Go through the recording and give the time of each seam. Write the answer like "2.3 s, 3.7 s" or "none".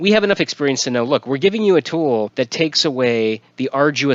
2.3 s